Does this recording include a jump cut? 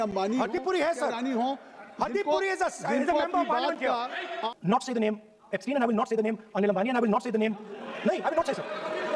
yes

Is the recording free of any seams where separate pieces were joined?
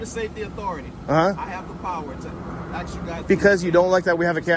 yes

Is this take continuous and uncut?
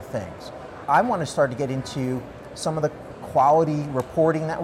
no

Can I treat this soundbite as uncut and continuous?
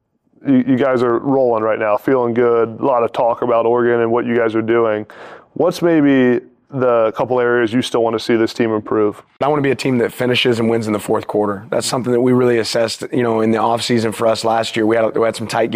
no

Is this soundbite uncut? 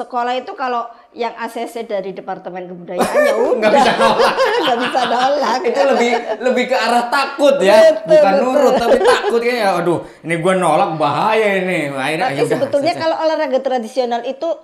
yes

